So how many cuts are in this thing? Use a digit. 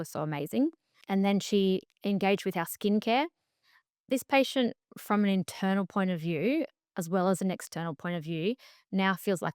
1